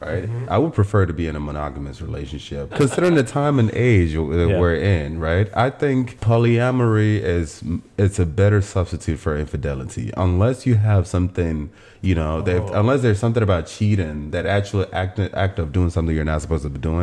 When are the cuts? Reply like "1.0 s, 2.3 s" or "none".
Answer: 2.7 s, 6.2 s

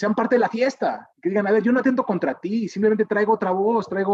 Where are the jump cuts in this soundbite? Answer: 1.1 s

